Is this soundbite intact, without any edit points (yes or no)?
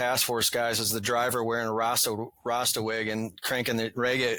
yes